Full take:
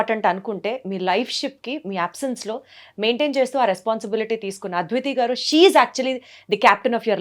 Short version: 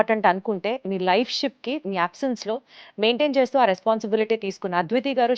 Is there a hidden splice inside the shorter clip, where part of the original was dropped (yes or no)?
no